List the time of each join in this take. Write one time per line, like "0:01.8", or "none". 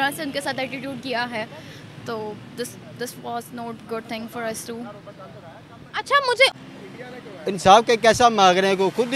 0:06.5